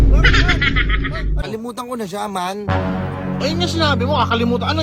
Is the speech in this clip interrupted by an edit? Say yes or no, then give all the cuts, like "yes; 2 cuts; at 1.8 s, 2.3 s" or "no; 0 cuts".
yes; 1 cut; at 1.4 s